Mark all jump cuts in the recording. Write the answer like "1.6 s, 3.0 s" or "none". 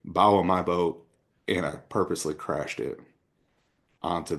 none